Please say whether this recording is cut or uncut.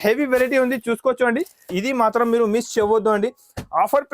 cut